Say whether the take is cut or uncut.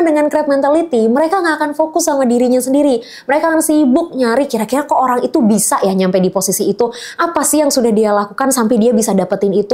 uncut